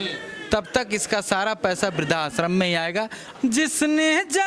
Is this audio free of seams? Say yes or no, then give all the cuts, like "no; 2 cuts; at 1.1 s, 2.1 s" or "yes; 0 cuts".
no; 1 cut; at 3.2 s